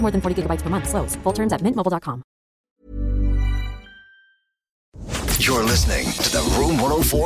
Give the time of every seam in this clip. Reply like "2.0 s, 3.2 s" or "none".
2.8 s, 5.0 s